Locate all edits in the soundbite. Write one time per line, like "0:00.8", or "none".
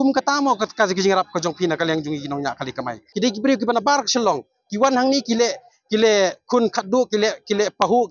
0:03.0